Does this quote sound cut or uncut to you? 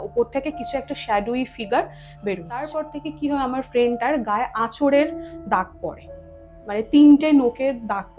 cut